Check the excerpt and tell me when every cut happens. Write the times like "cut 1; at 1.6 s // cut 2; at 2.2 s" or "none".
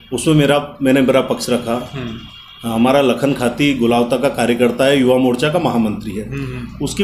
none